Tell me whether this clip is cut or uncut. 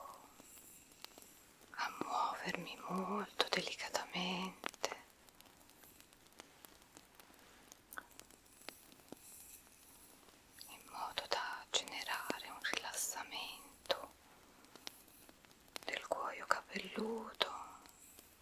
uncut